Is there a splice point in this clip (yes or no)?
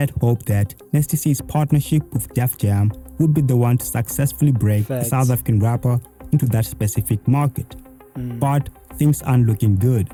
no